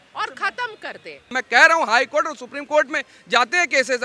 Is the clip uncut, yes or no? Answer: no